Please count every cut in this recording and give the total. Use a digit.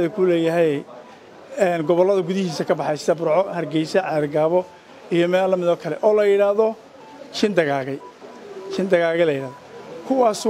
0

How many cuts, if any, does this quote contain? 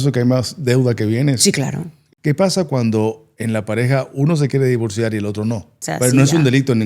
2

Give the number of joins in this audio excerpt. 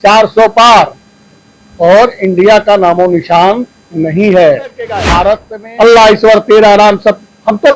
1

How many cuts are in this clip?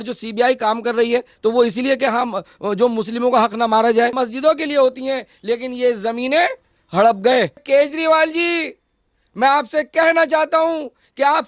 2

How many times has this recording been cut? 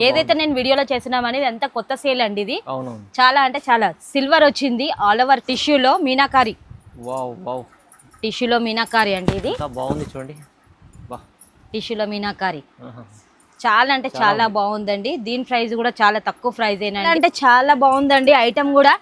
2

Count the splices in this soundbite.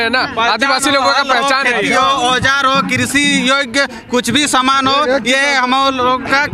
0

